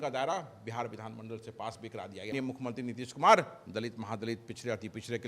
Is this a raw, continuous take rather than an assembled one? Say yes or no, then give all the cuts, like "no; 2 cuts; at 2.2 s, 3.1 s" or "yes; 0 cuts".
no; 1 cut; at 2.3 s